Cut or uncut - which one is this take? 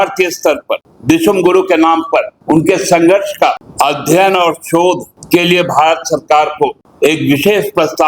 cut